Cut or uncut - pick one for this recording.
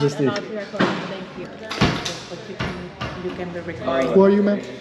cut